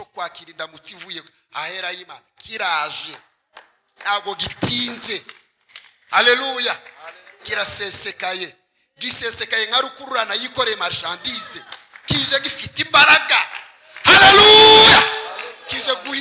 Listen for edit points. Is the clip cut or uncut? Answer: uncut